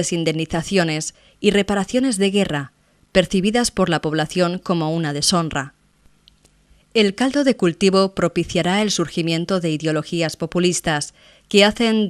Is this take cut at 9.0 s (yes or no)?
yes